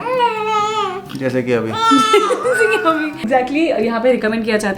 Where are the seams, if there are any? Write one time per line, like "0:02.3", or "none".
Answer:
0:03.2